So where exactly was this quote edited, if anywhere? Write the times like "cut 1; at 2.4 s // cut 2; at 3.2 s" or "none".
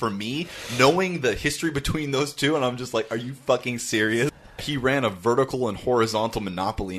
cut 1; at 4.6 s